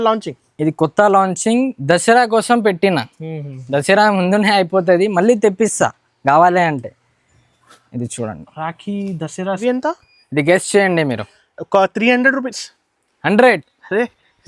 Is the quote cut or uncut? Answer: cut